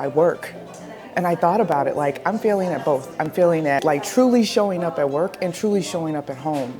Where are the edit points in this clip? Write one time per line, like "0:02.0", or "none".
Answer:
0:03.8